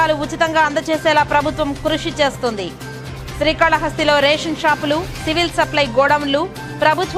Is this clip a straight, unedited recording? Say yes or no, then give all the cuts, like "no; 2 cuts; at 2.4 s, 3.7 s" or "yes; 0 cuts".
yes; 0 cuts